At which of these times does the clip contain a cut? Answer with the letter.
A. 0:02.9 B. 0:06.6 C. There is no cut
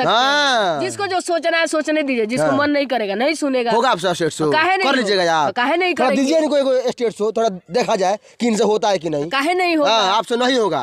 C